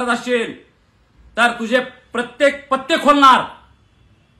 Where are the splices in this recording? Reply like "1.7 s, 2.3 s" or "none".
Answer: none